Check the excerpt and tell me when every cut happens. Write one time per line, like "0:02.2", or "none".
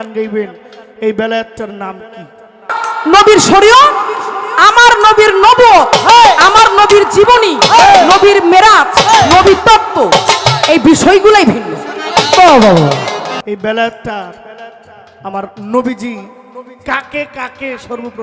0:02.8
0:13.4